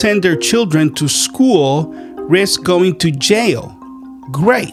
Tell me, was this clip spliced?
no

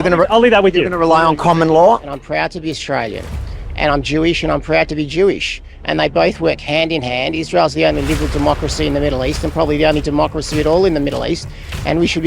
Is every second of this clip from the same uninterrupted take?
no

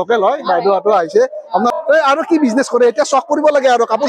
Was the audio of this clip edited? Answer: yes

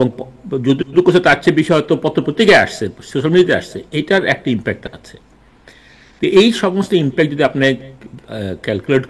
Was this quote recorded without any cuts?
yes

